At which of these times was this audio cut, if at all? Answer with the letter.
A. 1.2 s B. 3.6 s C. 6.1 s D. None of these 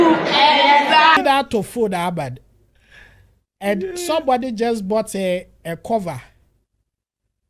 A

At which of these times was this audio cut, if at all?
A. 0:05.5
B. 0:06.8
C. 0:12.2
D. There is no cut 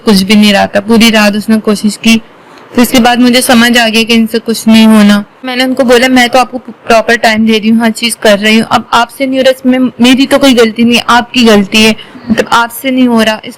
A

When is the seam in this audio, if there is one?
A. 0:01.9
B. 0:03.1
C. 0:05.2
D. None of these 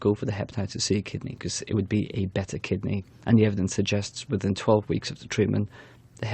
B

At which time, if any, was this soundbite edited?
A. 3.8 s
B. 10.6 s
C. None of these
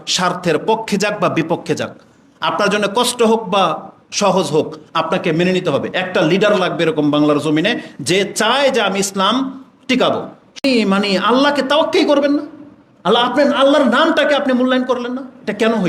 B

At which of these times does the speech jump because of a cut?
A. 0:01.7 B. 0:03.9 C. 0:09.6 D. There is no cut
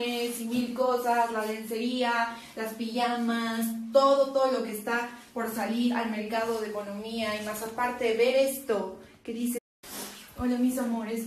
D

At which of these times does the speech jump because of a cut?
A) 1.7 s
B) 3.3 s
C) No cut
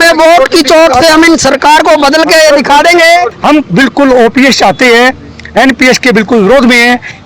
B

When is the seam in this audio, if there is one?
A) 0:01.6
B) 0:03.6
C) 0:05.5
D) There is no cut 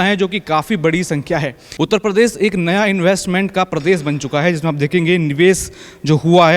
A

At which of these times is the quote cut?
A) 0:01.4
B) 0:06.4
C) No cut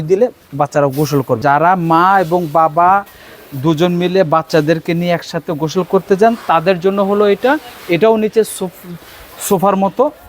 A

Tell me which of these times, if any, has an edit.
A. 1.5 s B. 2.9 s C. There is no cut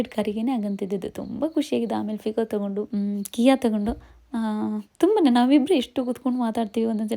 B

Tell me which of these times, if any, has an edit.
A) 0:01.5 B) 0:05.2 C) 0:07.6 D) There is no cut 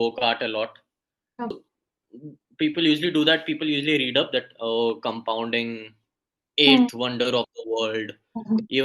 A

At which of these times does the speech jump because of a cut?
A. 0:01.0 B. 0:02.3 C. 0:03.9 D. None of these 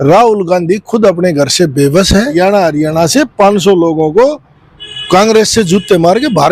B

